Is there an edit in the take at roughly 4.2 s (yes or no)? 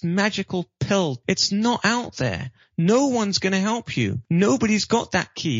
yes